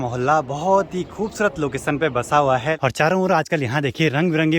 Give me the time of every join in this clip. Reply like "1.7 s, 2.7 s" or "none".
2.8 s

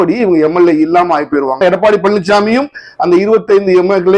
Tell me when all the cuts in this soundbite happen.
1.6 s

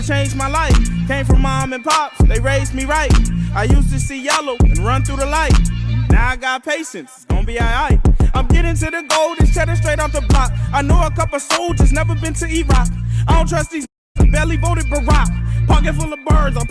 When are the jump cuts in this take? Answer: none

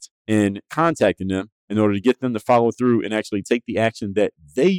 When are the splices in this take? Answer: none

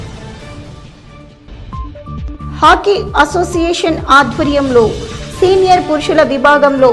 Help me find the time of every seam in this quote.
1.3 s

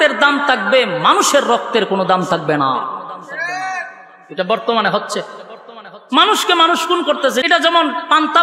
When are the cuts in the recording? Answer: 7.4 s

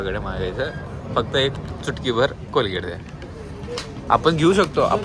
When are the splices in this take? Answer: none

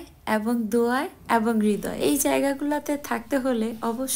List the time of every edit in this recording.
1.9 s

